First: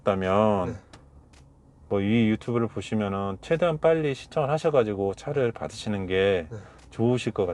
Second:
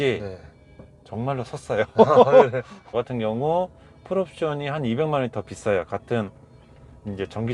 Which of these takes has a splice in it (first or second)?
second